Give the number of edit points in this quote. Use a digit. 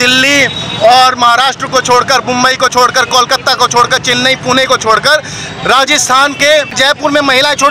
1